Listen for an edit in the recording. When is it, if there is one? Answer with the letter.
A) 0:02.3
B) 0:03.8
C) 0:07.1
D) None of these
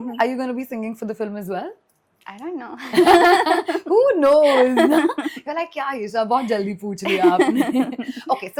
D